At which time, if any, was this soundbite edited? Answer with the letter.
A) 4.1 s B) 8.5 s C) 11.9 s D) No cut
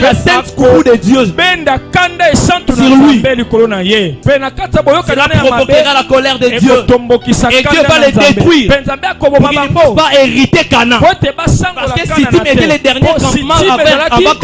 A